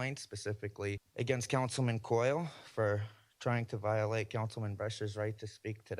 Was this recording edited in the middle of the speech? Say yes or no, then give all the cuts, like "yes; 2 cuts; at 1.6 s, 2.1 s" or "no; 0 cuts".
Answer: yes; 1 cut; at 1.1 s